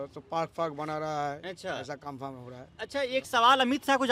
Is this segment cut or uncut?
uncut